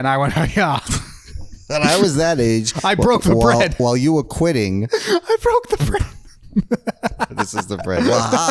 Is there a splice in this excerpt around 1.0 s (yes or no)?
no